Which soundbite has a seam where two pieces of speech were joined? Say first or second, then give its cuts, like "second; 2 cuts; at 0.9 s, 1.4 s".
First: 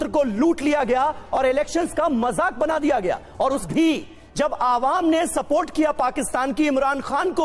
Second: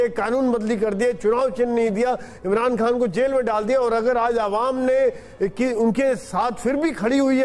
first; 1 cut; at 3.6 s